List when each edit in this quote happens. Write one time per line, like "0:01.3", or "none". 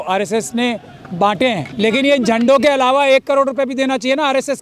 0:01.7